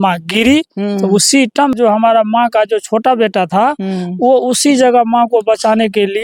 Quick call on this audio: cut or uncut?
cut